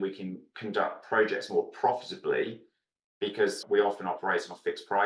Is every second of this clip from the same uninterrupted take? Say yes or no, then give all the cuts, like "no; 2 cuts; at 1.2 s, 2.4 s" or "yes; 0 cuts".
no; 1 cut; at 3.6 s